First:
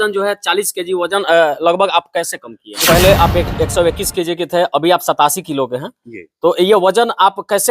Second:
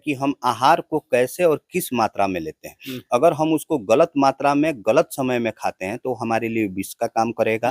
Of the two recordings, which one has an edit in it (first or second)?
first